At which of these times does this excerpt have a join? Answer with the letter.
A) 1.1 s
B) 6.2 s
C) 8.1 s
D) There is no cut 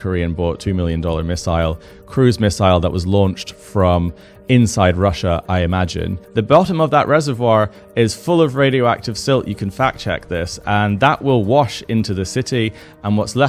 B